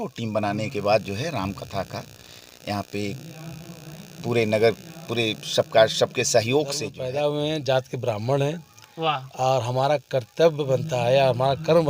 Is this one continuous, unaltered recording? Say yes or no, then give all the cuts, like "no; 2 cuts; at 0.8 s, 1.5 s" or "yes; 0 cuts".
no; 1 cut; at 6.9 s